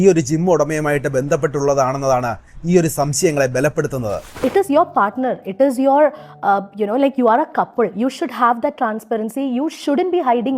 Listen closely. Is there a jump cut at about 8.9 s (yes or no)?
no